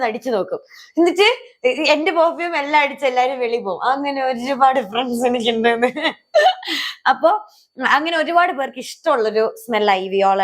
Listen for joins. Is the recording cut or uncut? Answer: uncut